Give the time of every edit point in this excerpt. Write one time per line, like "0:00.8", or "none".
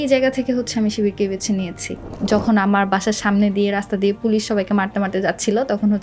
0:02.2